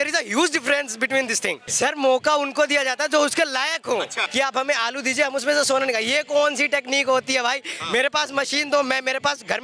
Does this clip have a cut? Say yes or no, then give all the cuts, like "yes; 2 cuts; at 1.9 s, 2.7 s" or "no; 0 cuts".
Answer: yes; 2 cuts; at 1.7 s, 4.2 s